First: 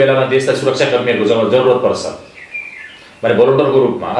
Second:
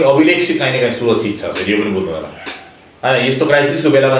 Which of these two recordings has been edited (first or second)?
second